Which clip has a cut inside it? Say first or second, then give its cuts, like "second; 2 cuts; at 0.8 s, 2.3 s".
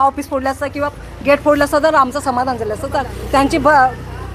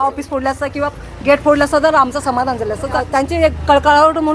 second; 1 cut; at 3.0 s